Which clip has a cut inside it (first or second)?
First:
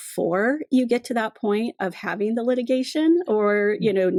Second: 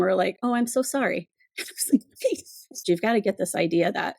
second